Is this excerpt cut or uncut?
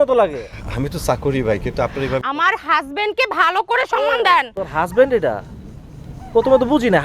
uncut